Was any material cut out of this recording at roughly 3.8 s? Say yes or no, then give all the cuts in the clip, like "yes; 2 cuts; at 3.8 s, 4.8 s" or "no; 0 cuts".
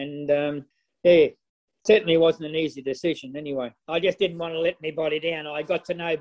yes; 1 cut; at 3.8 s